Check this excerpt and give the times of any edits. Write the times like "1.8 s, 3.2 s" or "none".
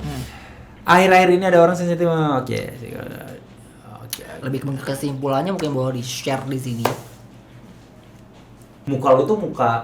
8.7 s